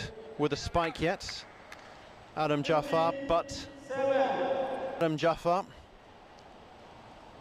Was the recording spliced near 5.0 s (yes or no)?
yes